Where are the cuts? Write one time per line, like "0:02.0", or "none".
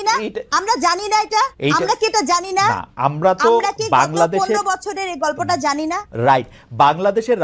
none